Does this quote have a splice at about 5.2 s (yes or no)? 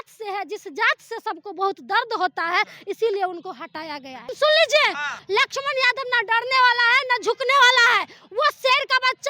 yes